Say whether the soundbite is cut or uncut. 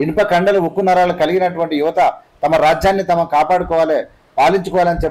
uncut